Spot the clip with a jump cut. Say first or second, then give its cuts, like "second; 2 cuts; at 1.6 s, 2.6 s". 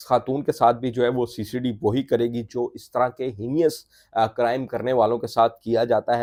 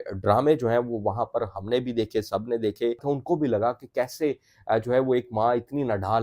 second; 1 cut; at 3.0 s